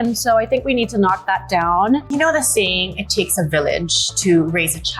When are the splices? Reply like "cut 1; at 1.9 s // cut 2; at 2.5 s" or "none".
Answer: cut 1; at 2.1 s